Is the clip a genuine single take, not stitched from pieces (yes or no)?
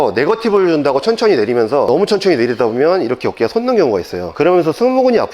no